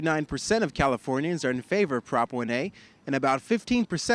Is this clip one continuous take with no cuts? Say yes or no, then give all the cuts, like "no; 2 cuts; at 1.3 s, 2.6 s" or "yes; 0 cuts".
yes; 0 cuts